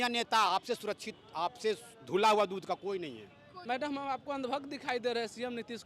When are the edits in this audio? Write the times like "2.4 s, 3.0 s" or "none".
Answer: 3.5 s